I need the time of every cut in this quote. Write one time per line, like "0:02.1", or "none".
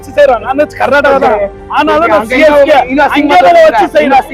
none